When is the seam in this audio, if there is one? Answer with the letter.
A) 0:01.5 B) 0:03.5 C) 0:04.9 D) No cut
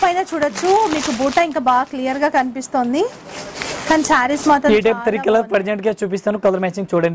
D